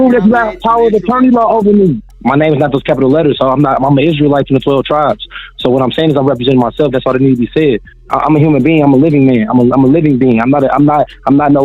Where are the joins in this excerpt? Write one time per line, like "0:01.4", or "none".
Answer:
0:02.1
0:08.0